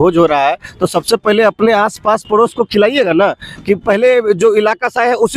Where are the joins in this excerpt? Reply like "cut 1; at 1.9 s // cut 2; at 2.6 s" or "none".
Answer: none